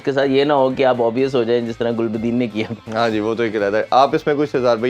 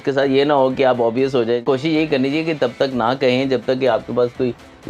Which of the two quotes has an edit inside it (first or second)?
second